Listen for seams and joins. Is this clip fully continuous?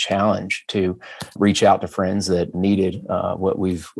no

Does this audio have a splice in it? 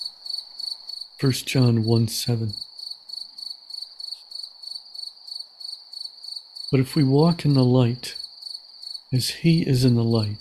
yes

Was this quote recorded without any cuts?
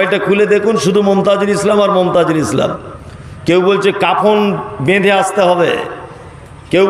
yes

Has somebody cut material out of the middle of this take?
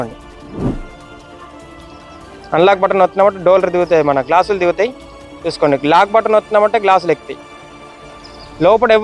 no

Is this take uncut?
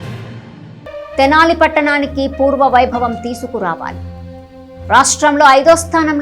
no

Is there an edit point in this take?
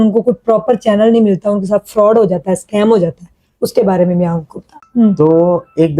yes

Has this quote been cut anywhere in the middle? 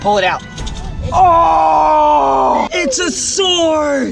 yes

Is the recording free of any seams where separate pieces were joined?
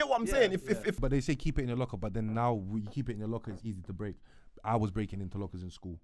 no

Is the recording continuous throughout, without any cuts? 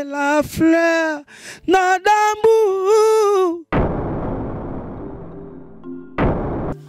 yes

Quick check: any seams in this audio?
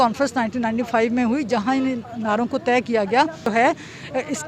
yes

